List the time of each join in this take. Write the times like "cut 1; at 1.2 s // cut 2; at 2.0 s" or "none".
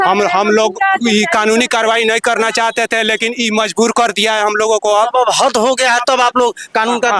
none